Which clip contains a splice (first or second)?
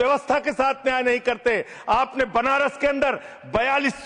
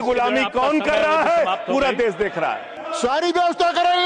second